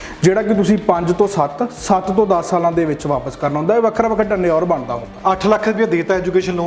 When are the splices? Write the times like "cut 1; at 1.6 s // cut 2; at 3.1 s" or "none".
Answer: cut 1; at 5.0 s